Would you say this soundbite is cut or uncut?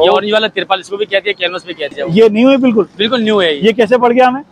uncut